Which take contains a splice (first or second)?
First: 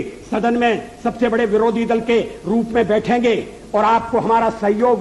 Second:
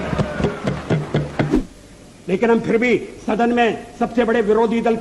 second